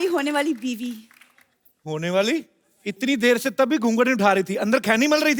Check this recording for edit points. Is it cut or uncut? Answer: uncut